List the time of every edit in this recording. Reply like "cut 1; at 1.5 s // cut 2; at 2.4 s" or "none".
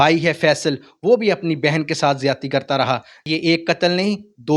cut 1; at 3.1 s